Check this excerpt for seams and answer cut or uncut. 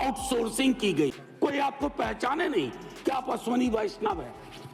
cut